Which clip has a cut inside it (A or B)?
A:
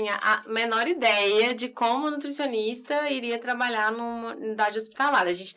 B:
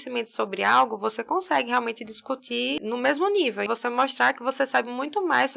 B